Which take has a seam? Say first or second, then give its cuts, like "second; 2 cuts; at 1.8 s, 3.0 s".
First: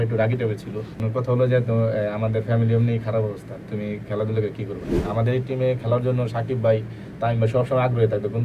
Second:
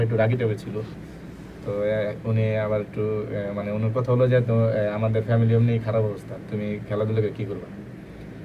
first; 2 cuts; at 1.0 s, 4.9 s